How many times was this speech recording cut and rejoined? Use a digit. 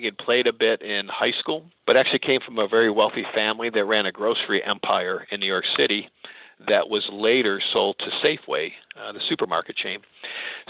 1